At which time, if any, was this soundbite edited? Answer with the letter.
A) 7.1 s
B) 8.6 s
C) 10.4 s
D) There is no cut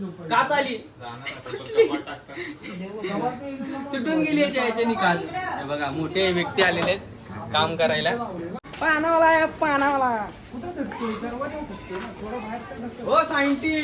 B